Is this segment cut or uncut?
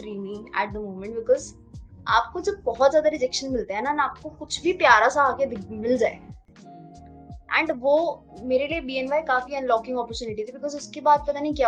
uncut